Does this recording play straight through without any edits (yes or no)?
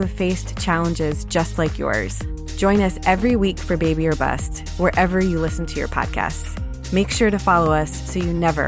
yes